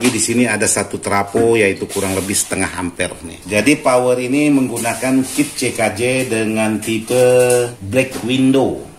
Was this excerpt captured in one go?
no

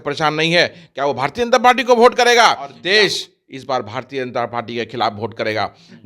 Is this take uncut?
no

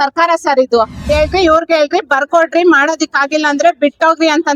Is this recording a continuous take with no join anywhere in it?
no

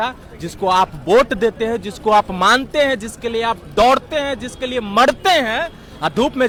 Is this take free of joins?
yes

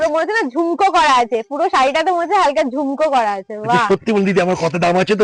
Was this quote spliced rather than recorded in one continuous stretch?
no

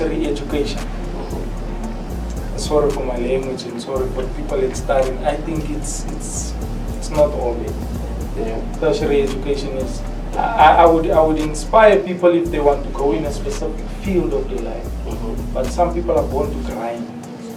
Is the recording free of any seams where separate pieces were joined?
yes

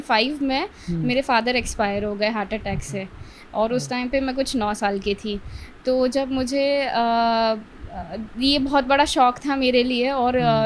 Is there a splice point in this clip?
no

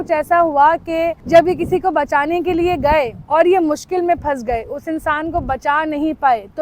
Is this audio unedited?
no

